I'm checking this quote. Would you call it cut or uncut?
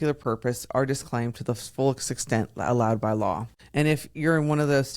cut